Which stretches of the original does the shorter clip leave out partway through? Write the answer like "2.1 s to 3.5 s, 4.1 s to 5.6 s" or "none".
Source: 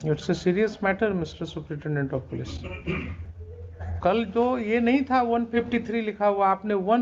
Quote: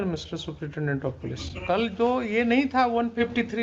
2.6 s to 3.9 s